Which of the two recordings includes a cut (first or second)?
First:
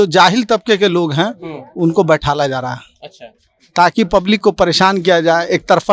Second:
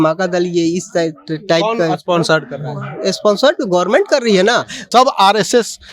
second